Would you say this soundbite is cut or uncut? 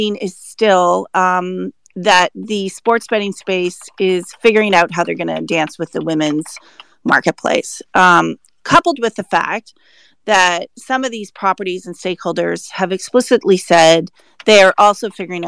uncut